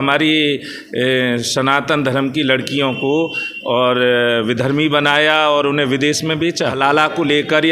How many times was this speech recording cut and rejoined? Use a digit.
1